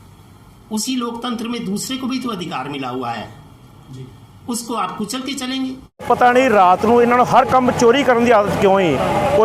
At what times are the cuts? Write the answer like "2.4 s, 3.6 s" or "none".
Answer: 6.1 s